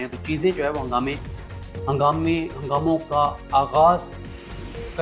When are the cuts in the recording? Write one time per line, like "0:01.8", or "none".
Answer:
none